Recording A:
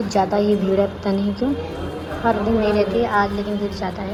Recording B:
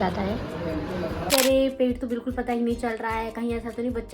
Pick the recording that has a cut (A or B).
B